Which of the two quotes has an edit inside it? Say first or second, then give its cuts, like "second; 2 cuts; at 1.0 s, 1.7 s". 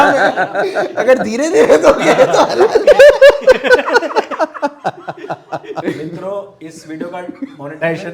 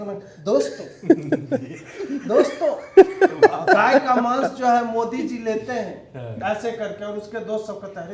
first; 1 cut; at 5.8 s